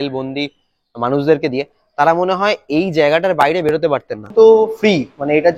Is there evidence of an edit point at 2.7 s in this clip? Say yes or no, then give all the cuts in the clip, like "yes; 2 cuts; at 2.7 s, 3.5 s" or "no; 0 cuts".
no; 1 cut; at 4.3 s